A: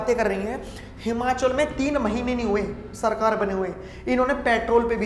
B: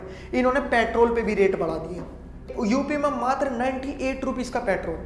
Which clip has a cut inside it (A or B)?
B